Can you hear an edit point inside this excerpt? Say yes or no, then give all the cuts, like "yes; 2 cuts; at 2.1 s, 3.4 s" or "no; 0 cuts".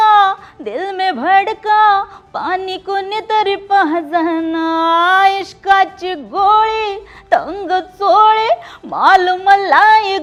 no; 0 cuts